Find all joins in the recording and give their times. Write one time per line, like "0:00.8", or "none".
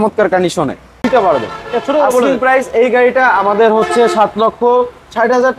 0:01.0